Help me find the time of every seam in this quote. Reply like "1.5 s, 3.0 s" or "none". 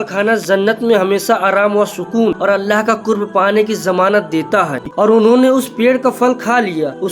4.8 s